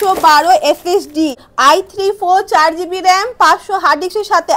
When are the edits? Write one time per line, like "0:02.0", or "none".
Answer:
0:01.5